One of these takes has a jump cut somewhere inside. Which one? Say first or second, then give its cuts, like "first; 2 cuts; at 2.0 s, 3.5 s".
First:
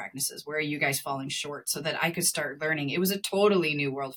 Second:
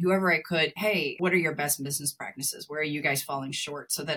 second; 1 cut; at 0.9 s